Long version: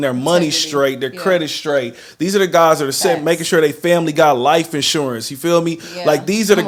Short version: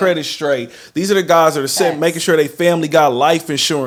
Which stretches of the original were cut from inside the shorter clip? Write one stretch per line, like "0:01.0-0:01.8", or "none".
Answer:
none